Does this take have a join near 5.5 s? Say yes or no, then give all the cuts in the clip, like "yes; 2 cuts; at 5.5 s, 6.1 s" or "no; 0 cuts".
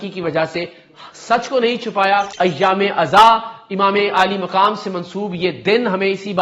no; 1 cut; at 2.3 s